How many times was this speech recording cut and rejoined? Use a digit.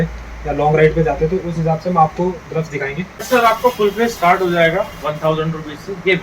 1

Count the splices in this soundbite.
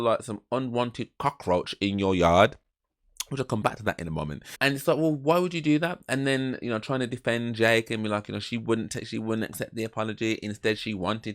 0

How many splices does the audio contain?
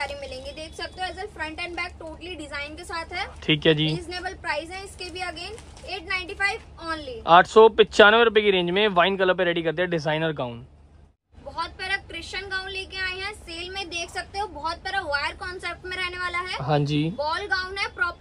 0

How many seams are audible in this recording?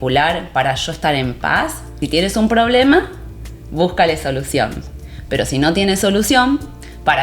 1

